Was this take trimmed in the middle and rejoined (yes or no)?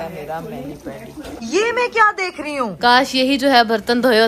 yes